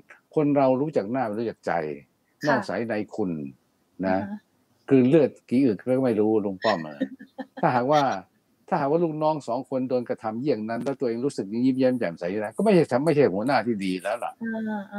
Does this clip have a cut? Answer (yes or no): no